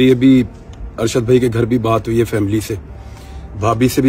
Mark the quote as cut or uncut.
uncut